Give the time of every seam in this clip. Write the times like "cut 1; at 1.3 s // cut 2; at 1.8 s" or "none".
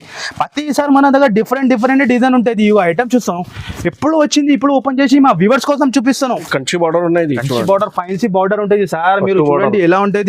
cut 1; at 6.5 s